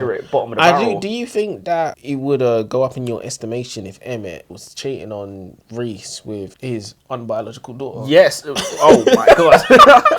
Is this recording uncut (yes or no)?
no